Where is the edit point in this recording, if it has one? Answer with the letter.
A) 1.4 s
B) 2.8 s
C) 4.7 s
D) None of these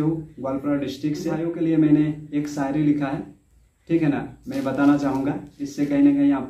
A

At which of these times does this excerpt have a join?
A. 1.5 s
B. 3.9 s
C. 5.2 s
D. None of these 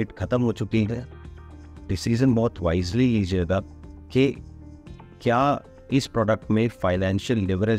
D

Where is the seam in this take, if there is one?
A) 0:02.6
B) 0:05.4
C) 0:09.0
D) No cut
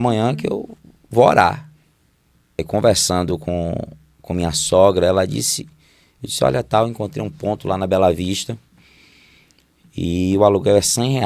A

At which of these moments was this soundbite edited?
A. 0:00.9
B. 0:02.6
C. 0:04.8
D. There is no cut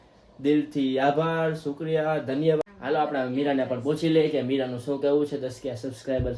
B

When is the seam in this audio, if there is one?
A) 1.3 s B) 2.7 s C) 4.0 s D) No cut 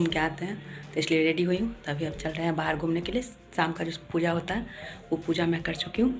D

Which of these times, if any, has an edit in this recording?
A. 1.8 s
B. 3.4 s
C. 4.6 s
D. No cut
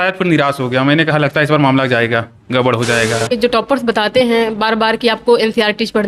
B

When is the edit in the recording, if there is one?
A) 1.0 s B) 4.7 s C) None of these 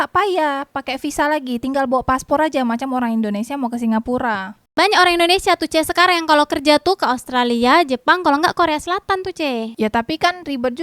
B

